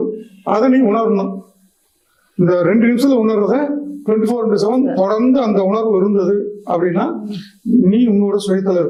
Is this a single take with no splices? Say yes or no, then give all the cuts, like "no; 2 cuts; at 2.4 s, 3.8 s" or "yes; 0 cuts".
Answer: yes; 0 cuts